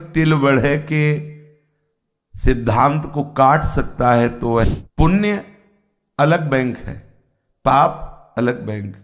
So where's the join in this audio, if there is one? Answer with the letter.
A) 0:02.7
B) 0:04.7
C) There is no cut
B